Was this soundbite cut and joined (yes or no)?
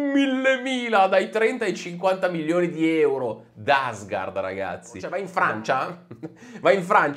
yes